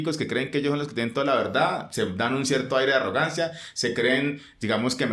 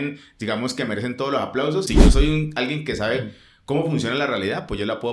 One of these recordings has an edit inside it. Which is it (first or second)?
second